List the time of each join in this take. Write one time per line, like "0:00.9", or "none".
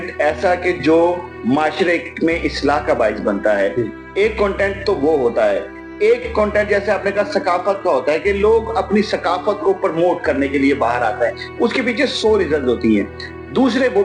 none